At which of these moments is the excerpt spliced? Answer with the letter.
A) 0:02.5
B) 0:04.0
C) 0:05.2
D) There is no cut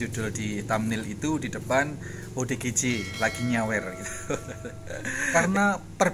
C